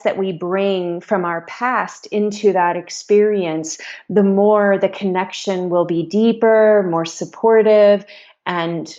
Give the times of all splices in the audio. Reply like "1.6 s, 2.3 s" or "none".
none